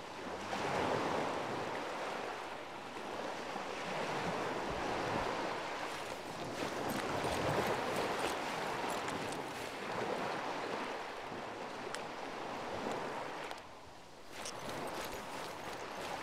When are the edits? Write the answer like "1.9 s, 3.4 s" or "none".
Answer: 14.9 s